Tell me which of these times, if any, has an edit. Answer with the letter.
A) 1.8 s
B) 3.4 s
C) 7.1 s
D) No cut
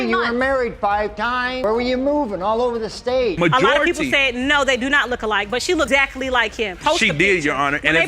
B